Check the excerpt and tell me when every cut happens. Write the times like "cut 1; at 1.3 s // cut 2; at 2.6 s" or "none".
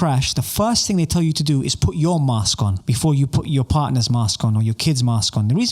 none